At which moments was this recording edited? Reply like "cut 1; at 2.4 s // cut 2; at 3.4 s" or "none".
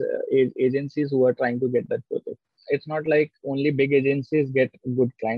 cut 1; at 2.5 s